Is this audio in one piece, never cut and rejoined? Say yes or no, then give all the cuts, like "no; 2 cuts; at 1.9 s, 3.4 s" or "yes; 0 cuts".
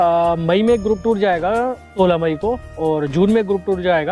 no; 1 cut; at 2.0 s